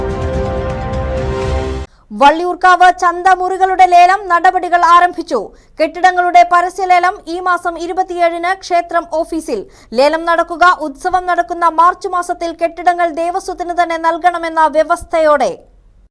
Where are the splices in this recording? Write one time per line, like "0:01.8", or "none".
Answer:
none